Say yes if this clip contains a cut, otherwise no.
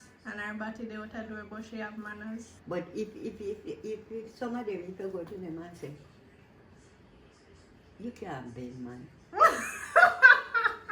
yes